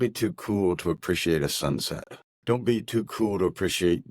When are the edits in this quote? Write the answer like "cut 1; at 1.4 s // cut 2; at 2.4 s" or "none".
cut 1; at 2.3 s